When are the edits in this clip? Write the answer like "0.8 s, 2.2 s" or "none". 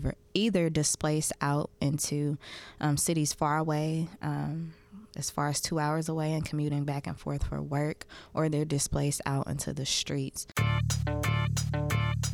10.4 s